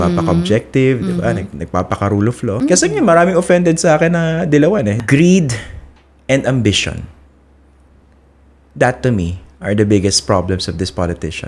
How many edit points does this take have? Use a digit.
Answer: 2